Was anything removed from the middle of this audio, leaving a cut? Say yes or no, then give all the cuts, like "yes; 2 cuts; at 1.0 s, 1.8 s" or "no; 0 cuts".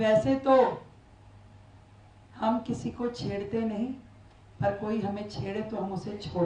no; 0 cuts